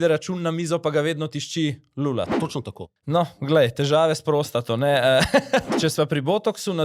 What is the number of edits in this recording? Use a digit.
2